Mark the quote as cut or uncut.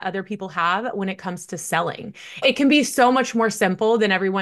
cut